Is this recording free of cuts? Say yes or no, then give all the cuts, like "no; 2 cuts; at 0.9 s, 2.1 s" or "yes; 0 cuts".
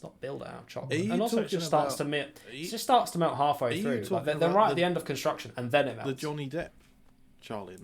yes; 0 cuts